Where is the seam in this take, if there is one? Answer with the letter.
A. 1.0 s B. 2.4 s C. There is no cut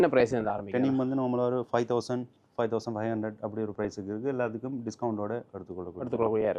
C